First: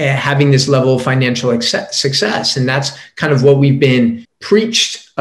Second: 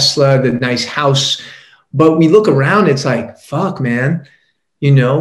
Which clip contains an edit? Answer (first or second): first